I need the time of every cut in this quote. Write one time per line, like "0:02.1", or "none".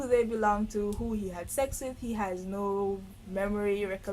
none